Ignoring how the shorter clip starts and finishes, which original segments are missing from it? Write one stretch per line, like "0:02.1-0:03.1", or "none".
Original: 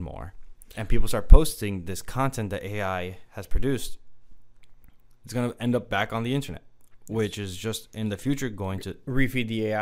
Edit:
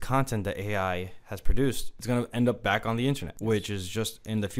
0:04.0-0:05.2
0:06.6-0:07.0